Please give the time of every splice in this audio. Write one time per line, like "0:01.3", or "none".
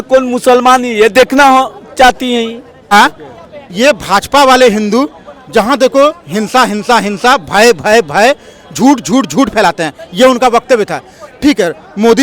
0:02.9